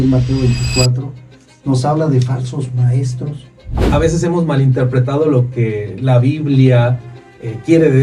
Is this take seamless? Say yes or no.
no